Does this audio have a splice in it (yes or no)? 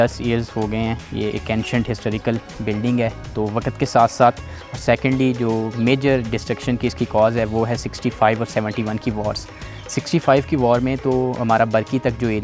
no